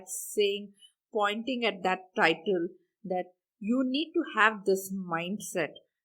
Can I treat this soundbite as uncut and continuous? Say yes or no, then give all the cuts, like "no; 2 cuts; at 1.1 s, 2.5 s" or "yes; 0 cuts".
yes; 0 cuts